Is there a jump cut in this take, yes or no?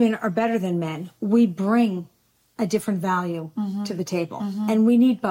no